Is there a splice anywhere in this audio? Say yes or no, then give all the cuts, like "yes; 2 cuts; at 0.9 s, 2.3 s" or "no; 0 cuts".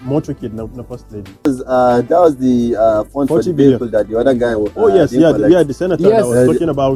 yes; 1 cut; at 1.5 s